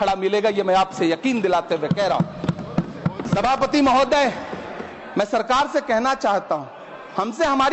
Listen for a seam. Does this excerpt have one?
no; 0 cuts

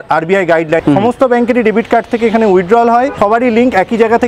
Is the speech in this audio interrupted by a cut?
yes; 2 cuts; at 0.8 s, 3.1 s

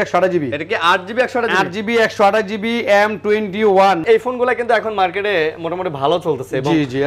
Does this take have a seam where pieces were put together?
yes; 1 cut; at 4.0 s

